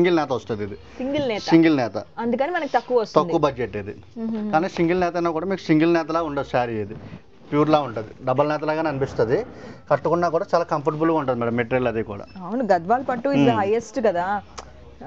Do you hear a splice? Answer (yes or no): no